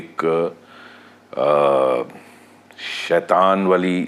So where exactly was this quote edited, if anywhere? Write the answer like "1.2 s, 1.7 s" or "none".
none